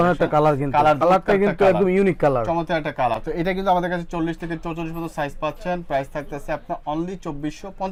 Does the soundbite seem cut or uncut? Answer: uncut